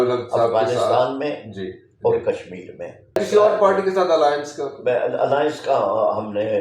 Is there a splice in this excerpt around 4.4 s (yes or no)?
no